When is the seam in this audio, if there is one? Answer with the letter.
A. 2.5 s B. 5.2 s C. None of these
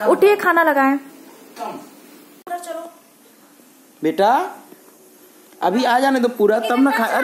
C